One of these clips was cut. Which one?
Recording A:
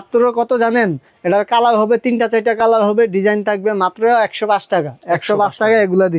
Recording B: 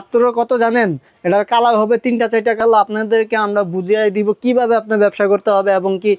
B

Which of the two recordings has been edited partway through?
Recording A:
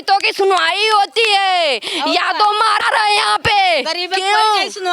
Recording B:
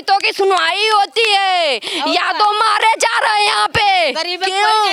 A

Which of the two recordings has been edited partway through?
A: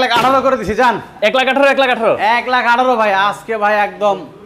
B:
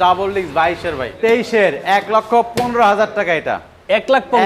B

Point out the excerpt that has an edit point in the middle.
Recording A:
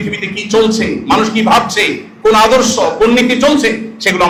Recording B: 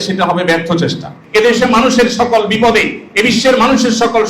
B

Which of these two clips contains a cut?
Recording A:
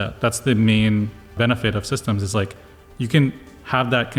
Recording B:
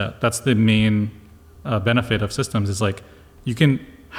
A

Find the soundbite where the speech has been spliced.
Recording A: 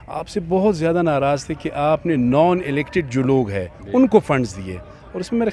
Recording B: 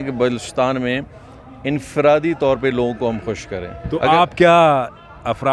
B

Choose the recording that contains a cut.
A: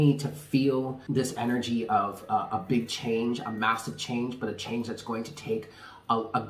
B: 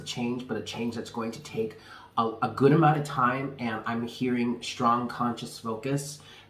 A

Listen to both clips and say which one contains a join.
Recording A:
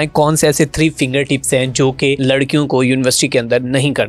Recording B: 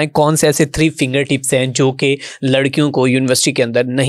A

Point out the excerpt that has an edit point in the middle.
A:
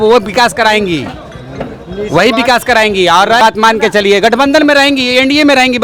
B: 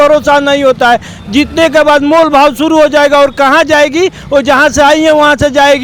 A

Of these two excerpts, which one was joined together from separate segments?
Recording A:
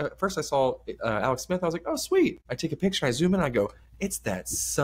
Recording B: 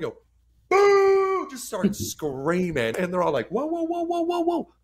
B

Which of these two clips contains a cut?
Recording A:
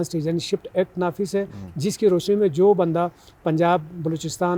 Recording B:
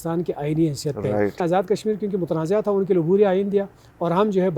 B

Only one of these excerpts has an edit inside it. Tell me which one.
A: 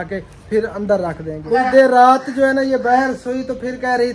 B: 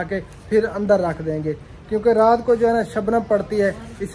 A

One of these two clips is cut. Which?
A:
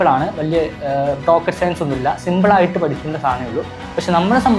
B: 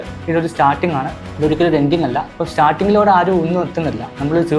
B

